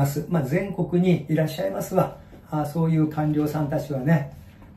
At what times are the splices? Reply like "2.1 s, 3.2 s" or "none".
none